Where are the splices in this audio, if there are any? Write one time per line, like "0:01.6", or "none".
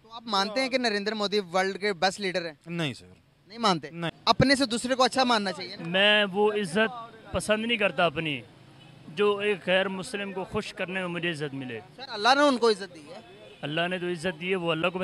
0:04.2